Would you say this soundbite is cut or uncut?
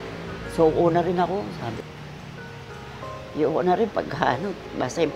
cut